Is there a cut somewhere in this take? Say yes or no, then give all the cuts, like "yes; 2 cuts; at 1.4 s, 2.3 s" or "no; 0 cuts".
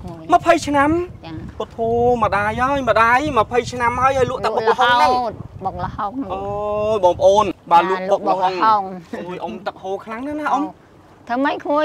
yes; 1 cut; at 7.5 s